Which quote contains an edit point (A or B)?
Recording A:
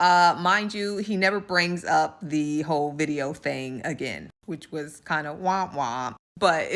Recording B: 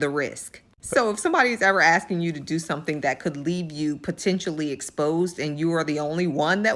A